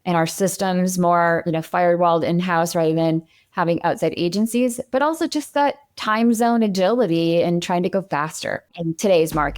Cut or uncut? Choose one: cut